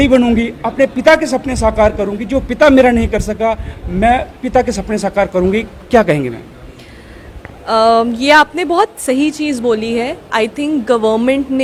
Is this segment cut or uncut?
uncut